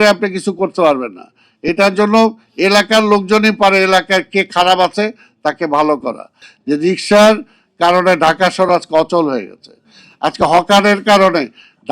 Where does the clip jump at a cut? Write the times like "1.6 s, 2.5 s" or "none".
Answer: 6.5 s